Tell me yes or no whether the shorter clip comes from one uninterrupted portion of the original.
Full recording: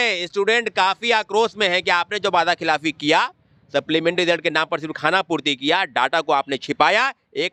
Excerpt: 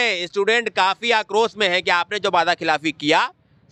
yes